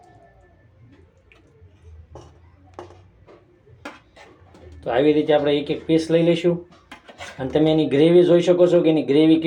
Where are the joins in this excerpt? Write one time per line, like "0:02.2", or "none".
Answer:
none